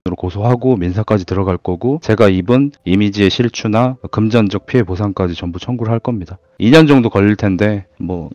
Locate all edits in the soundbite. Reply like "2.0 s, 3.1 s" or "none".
none